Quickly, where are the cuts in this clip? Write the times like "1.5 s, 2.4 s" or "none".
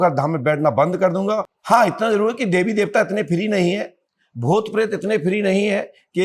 1.5 s